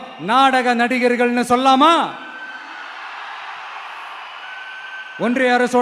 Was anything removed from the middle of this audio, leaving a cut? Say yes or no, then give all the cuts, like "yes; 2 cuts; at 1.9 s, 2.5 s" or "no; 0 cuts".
no; 0 cuts